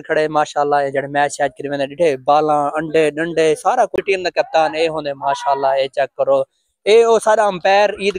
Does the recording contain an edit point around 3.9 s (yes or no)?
yes